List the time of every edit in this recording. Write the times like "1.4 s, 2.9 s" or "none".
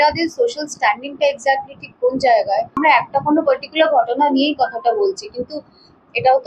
2.8 s